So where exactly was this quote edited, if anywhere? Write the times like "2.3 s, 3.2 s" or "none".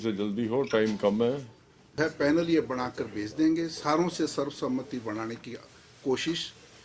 2.0 s